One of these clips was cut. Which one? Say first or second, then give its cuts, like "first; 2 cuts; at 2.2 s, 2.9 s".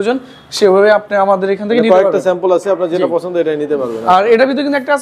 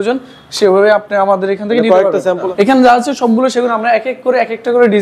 second; 1 cut; at 2.4 s